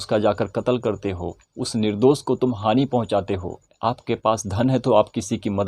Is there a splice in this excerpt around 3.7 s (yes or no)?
yes